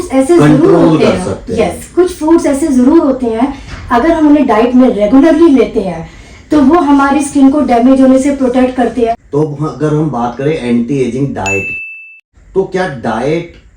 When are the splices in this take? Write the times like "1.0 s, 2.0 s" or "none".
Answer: 9.2 s